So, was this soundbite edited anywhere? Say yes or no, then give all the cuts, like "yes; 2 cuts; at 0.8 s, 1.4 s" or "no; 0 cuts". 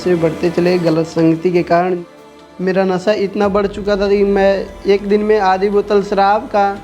yes; 1 cut; at 2.0 s